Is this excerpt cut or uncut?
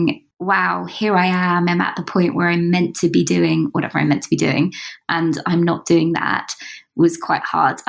uncut